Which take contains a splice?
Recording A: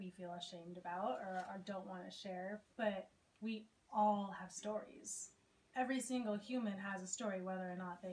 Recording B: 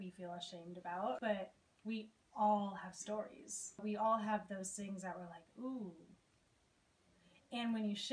B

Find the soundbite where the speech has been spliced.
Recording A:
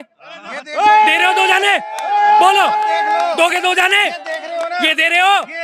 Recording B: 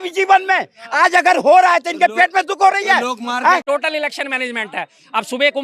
B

